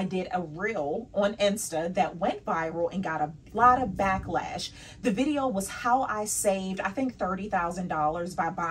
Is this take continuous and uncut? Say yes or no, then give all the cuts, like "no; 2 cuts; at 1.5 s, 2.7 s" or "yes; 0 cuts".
yes; 0 cuts